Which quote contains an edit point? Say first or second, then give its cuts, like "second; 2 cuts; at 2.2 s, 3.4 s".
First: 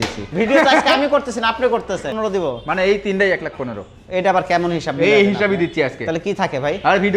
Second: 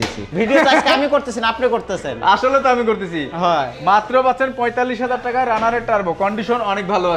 first; 1 cut; at 2.1 s